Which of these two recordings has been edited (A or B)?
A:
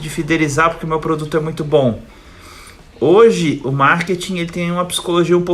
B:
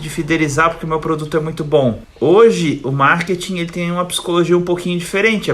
B